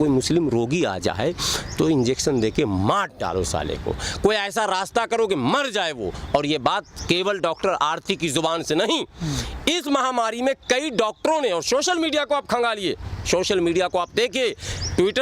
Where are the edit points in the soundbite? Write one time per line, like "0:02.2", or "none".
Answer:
none

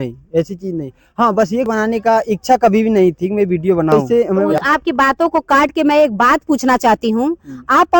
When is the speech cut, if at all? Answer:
0:01.7
0:03.9

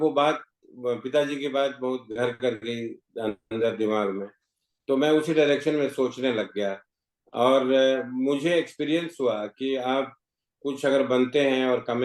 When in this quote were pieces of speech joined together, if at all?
none

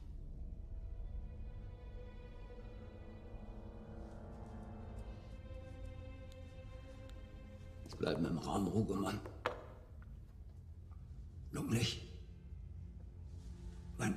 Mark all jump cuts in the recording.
0:04.0

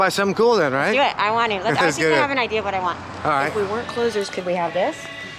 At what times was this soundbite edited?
0:03.5

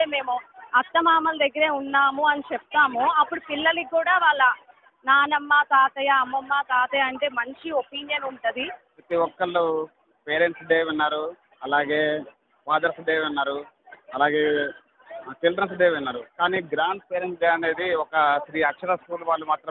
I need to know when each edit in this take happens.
0:08.9

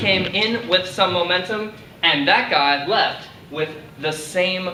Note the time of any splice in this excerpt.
none

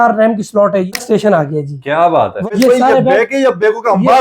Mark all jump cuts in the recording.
0:00.9
0:02.5

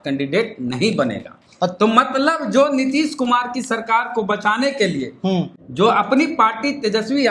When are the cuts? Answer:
0:05.6

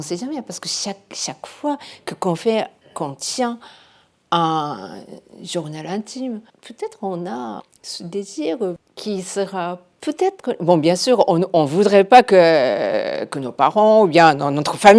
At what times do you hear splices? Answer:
0:06.6
0:07.7
0:08.8

